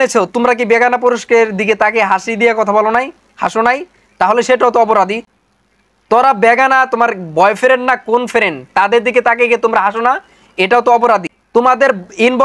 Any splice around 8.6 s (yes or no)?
no